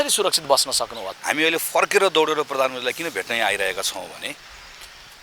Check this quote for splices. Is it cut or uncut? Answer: cut